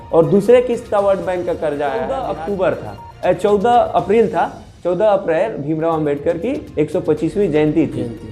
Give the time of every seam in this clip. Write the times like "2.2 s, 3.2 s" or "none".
2.2 s